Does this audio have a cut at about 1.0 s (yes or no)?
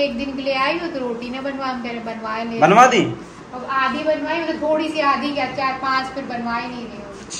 no